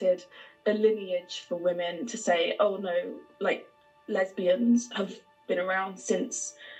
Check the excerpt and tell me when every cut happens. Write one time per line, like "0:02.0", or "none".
none